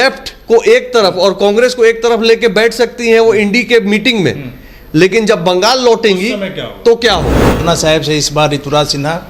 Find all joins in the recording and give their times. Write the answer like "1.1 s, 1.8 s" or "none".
7.6 s